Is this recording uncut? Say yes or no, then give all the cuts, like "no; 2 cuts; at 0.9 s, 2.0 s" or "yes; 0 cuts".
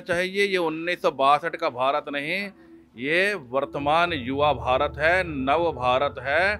yes; 0 cuts